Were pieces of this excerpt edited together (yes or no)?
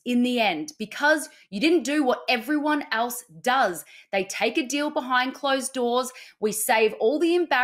yes